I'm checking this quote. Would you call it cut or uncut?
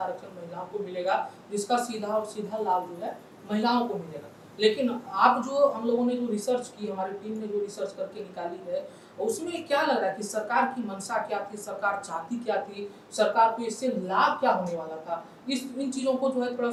uncut